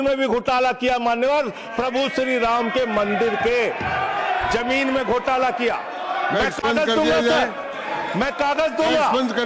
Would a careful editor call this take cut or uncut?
uncut